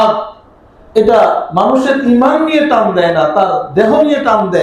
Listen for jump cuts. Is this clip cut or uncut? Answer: uncut